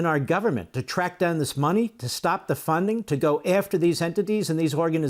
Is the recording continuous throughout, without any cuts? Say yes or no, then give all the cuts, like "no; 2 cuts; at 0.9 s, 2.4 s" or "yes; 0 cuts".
yes; 0 cuts